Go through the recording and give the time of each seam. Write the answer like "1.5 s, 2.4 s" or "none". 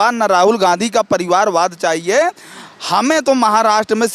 none